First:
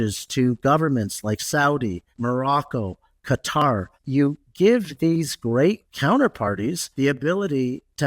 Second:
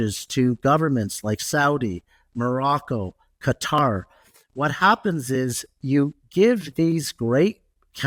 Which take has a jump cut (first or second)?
first